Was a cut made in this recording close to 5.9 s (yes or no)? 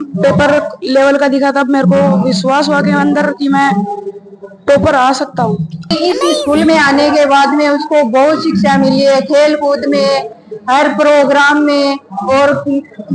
yes